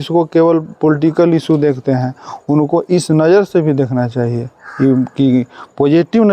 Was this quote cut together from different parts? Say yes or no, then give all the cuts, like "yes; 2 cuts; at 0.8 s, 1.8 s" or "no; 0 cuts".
no; 0 cuts